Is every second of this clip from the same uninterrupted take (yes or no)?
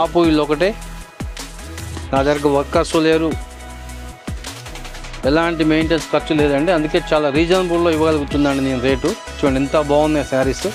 yes